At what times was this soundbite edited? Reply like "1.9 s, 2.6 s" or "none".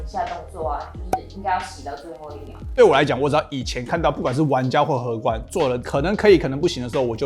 2.6 s, 5.8 s